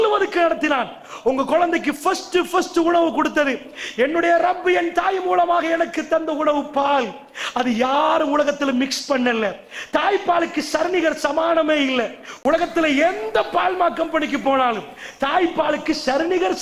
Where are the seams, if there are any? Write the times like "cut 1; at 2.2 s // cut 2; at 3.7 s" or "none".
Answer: none